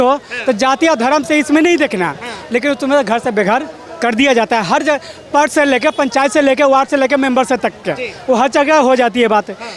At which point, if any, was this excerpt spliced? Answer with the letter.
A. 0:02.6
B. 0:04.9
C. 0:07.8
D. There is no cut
D